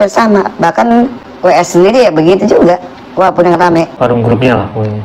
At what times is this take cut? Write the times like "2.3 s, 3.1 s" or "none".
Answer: 1.2 s, 3.9 s